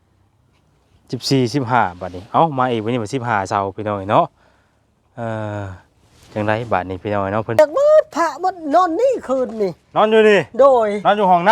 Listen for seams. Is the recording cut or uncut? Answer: cut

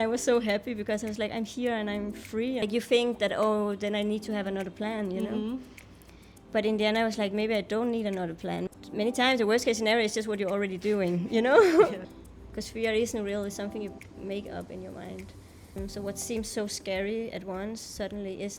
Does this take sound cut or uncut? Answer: cut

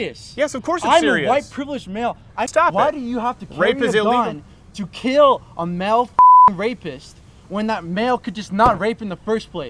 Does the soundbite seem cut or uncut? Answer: cut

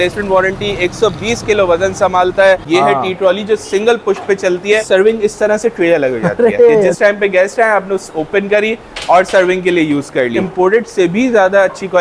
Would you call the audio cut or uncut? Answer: cut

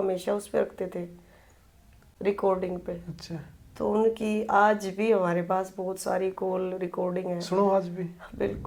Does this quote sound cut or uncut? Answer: uncut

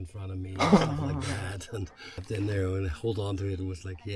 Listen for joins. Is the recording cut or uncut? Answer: cut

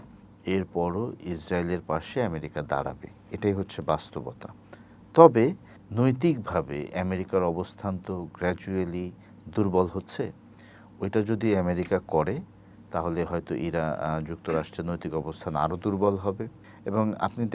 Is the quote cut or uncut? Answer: uncut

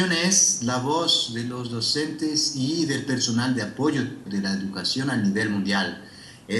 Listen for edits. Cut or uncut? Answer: uncut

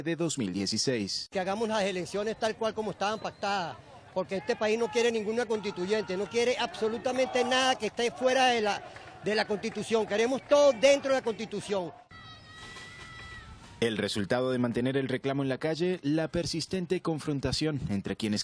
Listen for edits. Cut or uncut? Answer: cut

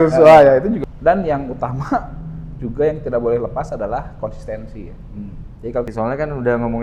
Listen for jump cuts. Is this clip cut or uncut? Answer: cut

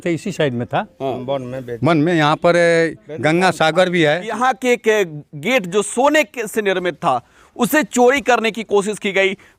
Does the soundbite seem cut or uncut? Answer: cut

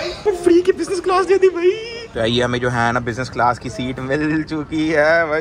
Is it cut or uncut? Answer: cut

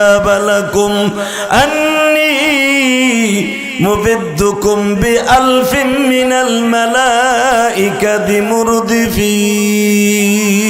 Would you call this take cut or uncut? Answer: uncut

